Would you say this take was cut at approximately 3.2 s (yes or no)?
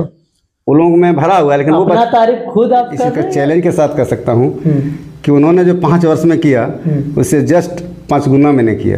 yes